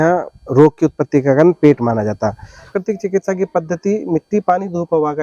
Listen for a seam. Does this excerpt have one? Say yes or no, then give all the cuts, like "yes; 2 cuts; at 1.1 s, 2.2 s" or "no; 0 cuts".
yes; 1 cut; at 2.7 s